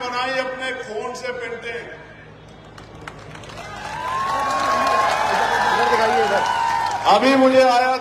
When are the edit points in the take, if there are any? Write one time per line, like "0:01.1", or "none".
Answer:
none